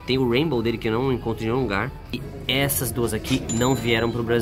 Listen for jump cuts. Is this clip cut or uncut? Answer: cut